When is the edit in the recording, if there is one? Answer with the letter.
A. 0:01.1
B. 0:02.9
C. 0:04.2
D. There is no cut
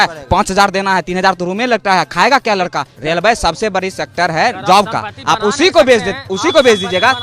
B